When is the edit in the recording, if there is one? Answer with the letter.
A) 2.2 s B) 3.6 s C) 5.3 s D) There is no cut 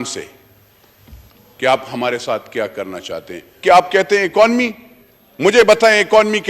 B